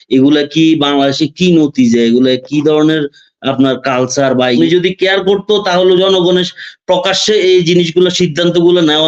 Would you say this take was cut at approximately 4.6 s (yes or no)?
yes